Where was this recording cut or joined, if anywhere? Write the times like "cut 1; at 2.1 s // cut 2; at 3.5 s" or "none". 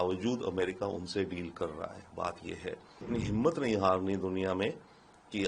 cut 1; at 3.1 s